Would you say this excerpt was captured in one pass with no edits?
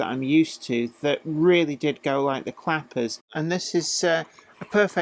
no; 1 cut; at 3.3 s

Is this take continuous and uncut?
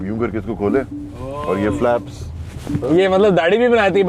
no; 1 cut; at 2.8 s

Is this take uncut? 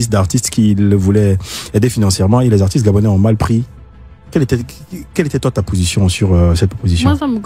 yes; 0 cuts

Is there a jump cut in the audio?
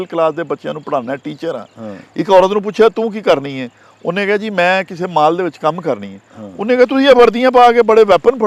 no; 0 cuts

